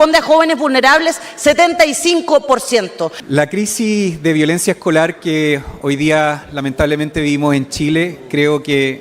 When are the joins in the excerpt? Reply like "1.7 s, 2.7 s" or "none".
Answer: 3.2 s